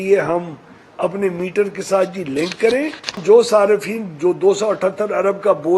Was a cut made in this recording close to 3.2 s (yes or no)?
yes